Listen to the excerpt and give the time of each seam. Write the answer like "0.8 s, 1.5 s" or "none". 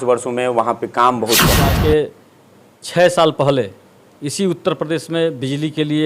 1.7 s